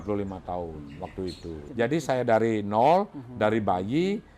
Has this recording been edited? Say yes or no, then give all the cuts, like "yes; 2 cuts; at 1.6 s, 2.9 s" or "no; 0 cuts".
yes; 1 cut; at 1.6 s